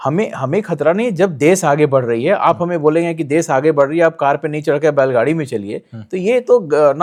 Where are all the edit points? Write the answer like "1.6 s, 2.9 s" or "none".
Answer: none